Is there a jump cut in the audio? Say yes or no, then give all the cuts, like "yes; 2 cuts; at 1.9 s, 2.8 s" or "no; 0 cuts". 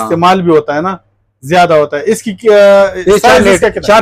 no; 0 cuts